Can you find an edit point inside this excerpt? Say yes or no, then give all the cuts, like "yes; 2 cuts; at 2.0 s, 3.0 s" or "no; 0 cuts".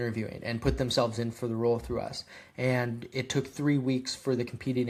no; 0 cuts